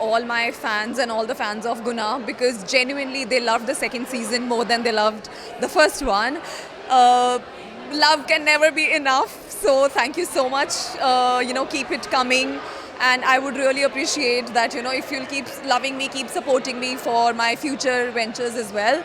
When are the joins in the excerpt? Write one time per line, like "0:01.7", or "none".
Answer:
none